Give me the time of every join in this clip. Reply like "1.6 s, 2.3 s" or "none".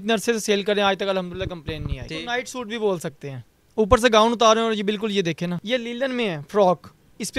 2.1 s, 5.6 s